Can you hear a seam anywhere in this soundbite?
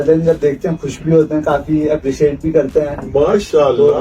no; 0 cuts

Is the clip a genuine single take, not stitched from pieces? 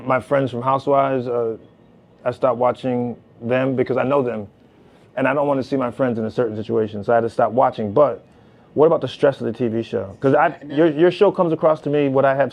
yes; 0 cuts

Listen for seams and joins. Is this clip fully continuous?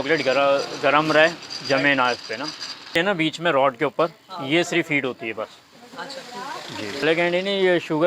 no; 2 cuts; at 2.9 s, 7.0 s

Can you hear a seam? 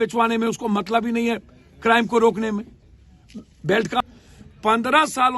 yes; 1 cut; at 4.0 s

